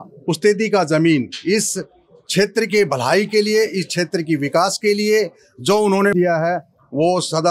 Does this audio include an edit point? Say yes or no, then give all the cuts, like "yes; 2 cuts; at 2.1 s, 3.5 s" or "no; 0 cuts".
no; 0 cuts